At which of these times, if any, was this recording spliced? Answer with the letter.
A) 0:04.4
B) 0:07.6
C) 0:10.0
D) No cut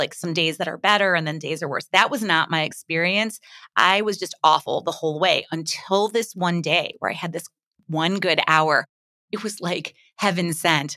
D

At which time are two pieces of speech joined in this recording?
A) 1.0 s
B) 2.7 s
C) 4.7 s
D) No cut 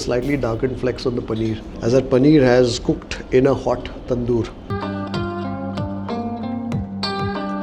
C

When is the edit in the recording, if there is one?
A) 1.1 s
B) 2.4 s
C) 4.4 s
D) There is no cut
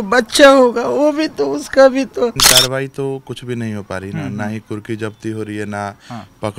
B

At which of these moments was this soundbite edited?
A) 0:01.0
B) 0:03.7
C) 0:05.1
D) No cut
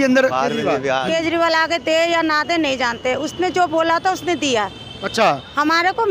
A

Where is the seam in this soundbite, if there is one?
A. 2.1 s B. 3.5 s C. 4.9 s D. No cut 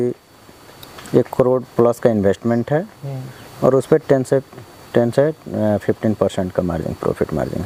D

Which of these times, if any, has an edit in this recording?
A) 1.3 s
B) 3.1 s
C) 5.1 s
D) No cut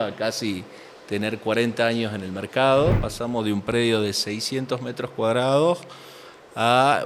B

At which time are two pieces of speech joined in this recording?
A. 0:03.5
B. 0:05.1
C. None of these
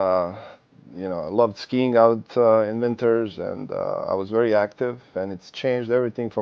B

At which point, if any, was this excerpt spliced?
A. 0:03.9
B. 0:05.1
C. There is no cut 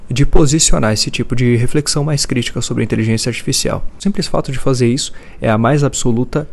A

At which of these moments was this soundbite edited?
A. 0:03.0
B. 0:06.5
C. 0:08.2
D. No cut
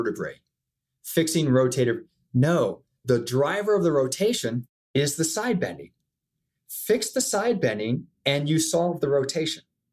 A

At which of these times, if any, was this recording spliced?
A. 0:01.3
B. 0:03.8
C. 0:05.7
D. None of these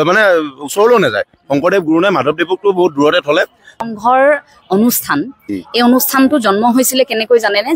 B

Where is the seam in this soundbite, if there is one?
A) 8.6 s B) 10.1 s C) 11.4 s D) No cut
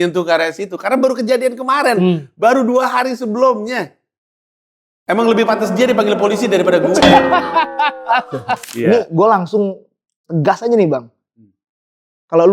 A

